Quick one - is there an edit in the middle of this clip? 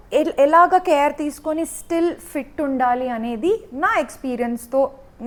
no; 0 cuts

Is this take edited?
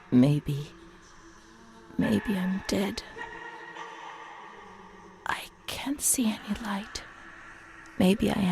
yes; 2 cuts; at 3.1 s, 5.2 s

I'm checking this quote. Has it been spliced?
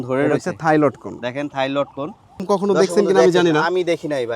yes; 1 cut; at 2.4 s

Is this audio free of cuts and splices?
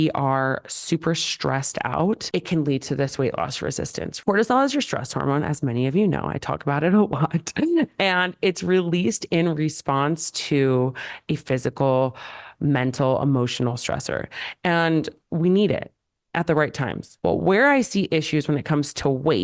no; 2 cuts; at 4.2 s, 17.0 s

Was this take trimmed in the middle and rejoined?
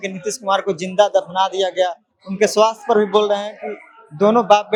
no; 0 cuts

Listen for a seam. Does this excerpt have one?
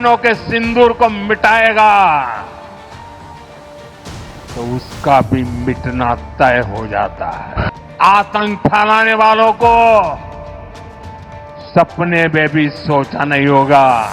yes; 3 cuts; at 7.7 s, 10.2 s, 11.7 s

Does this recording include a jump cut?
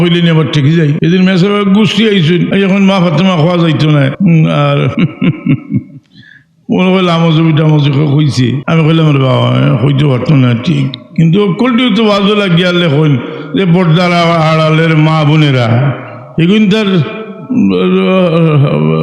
yes; 5 cuts; at 1.0 s, 2.5 s, 4.1 s, 4.9 s, 8.6 s

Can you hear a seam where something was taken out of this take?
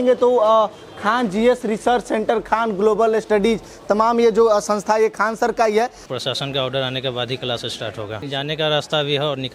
yes; 2 cuts; at 6.0 s, 8.1 s

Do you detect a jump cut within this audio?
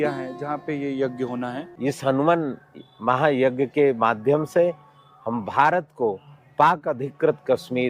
yes; 1 cut; at 1.6 s

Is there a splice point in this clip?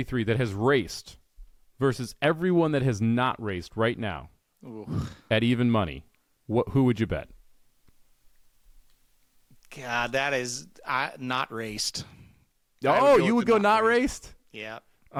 no; 0 cuts

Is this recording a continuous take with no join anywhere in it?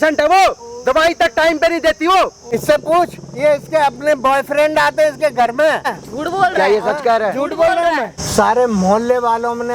no; 3 cuts; at 2.4 s, 6.0 s, 8.1 s

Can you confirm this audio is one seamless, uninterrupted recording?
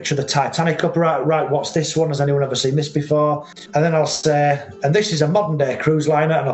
no; 1 cut; at 4.0 s

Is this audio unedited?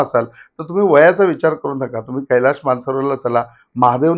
yes; 0 cuts

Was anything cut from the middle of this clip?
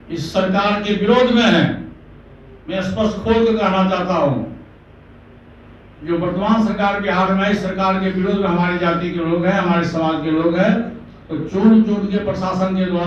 no; 0 cuts

